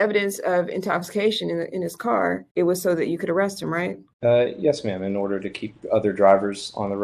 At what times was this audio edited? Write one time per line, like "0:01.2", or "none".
0:04.0